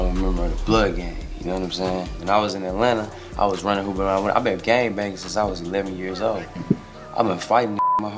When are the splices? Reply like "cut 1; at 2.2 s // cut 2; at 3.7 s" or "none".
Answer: none